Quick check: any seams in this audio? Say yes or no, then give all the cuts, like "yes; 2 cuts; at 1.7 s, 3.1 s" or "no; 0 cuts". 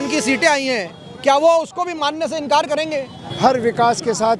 yes; 1 cut; at 3.2 s